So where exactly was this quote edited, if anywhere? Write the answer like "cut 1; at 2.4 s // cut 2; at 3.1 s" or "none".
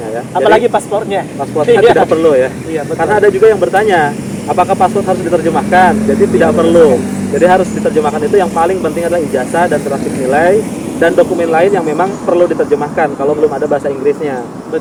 none